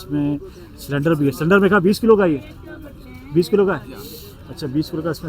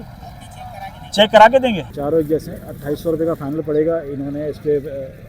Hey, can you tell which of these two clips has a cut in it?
second; 1 cut; at 1.9 s

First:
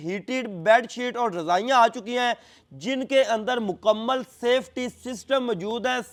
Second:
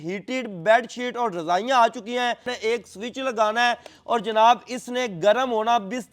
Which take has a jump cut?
second; 1 cut; at 2.5 s

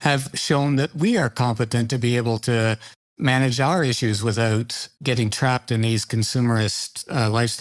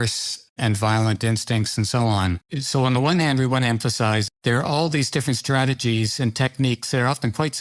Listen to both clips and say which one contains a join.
second; 2 cuts; at 2.5 s, 4.2 s

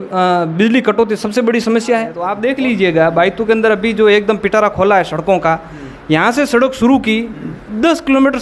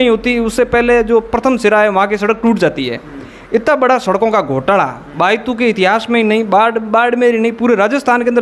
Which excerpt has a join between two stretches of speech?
first; 1 cut; at 2.3 s

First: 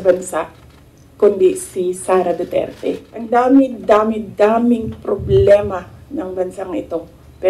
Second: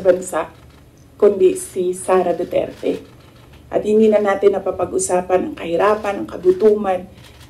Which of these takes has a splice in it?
first; 1 cut; at 3.1 s

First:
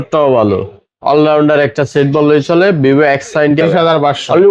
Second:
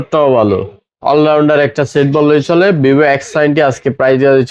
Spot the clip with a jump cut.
first; 1 cut; at 3.6 s

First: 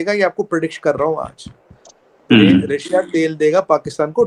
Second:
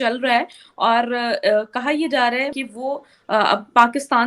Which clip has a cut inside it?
second; 1 cut; at 2.6 s

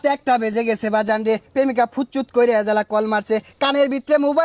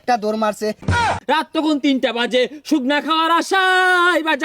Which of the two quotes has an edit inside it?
second; 1 cut; at 1.0 s

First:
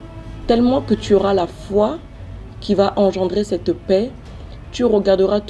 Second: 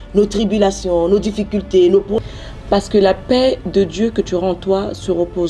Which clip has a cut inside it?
second; 1 cut; at 2.2 s

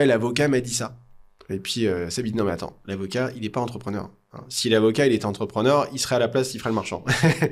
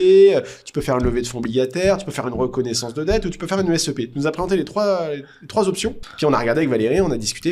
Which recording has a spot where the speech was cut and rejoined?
second; 1 cut; at 6.0 s

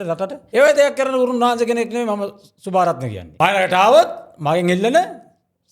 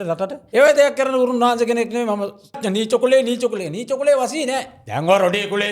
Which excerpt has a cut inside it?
second; 1 cut; at 2.6 s

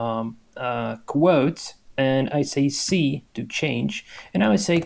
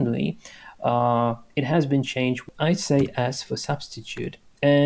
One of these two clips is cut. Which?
second; 1 cut; at 2.5 s

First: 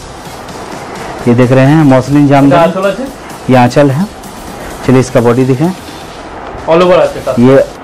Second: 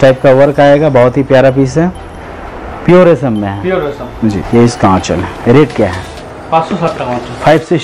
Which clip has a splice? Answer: second; 1 cut; at 4.4 s

